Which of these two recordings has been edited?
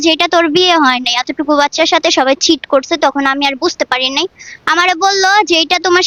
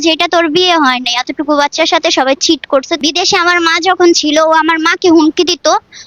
second; 1 cut; at 3.0 s

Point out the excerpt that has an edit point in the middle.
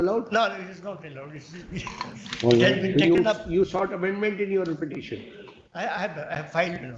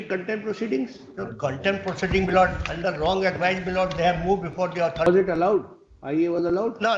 second; 1 cut; at 5.1 s

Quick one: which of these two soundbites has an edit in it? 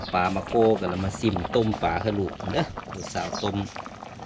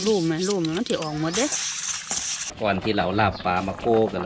second; 1 cut; at 2.4 s

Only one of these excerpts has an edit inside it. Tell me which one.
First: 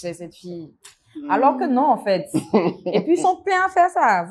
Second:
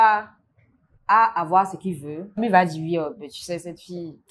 second; 1 cut; at 2.4 s

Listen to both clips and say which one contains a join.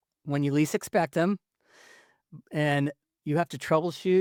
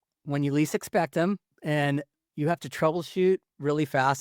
second; 1 cut; at 1.5 s

